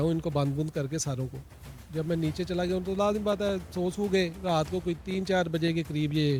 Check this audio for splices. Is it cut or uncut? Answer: uncut